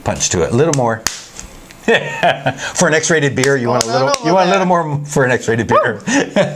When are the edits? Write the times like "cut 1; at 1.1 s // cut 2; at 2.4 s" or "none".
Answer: none